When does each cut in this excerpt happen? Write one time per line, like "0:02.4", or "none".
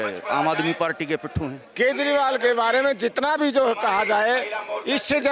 0:01.6